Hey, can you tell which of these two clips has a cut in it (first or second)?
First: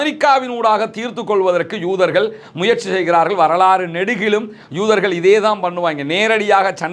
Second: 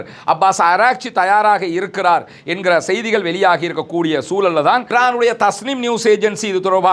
second